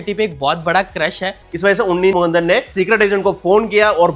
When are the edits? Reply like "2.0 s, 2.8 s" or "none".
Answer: 1.4 s